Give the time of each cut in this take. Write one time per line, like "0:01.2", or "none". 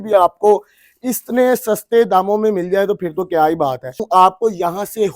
0:04.0